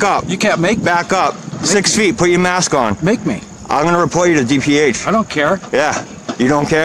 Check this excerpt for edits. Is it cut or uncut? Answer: uncut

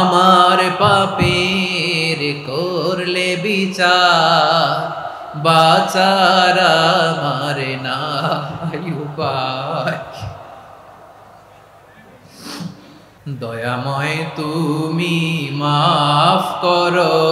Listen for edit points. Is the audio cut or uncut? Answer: cut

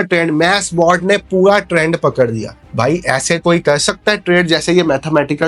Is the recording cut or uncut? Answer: uncut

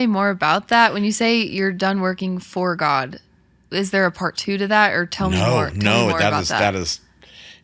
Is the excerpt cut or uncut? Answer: uncut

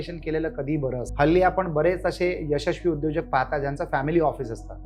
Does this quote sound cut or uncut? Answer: cut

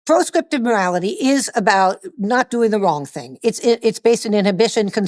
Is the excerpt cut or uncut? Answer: uncut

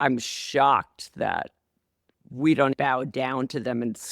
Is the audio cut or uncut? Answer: cut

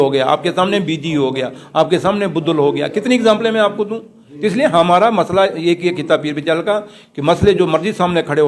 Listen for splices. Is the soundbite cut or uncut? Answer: uncut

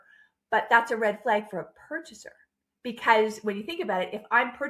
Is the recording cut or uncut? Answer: uncut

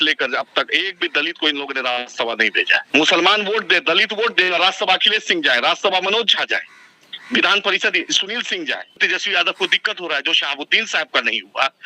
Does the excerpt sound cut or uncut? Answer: cut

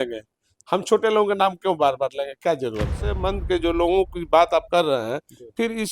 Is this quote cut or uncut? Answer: cut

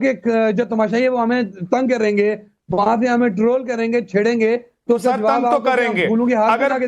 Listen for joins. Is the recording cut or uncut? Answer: uncut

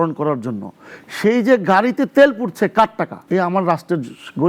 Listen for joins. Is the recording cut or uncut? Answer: cut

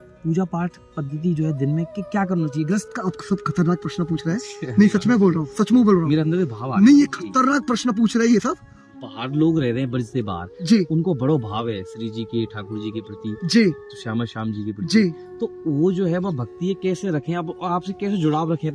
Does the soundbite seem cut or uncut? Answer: cut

